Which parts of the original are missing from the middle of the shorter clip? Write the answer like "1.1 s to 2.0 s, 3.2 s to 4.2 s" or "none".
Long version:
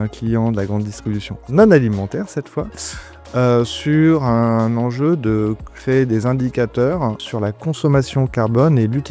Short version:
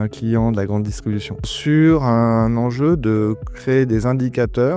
1.5 s to 3.7 s